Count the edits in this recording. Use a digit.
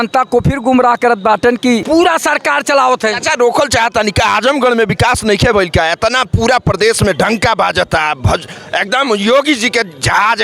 1